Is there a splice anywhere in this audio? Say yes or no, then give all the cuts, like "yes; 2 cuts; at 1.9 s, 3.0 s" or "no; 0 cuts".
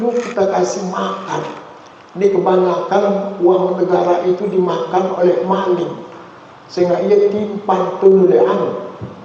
no; 0 cuts